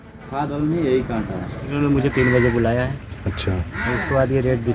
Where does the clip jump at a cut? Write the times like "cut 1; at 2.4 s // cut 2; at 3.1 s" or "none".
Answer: cut 1; at 1.6 s